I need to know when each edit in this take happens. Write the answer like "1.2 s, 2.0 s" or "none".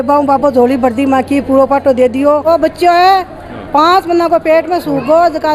2.4 s